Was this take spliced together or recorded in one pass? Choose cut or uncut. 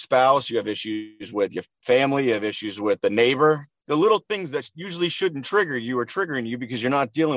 uncut